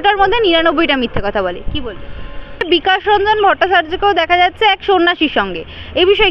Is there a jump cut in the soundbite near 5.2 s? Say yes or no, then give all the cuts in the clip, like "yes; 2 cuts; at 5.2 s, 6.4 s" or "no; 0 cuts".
no; 1 cut; at 2.6 s